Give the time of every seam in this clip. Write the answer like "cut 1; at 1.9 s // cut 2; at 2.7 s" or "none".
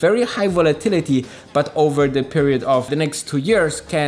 cut 1; at 2.9 s